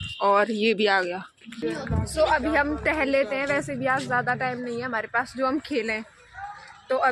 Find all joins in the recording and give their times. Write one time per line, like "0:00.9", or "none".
none